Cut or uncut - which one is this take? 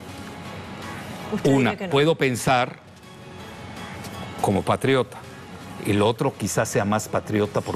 uncut